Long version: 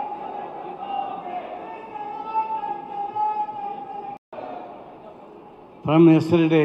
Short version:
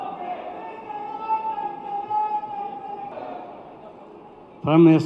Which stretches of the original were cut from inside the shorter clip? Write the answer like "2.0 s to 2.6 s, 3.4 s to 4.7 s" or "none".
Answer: 4.2 s to 4.3 s